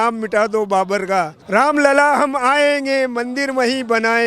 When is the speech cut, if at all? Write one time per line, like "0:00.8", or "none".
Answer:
0:01.4